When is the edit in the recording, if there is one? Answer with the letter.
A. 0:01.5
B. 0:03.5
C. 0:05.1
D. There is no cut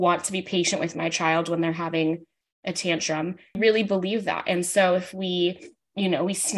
B